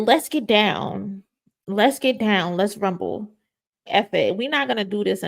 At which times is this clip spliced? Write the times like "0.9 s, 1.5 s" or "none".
3.8 s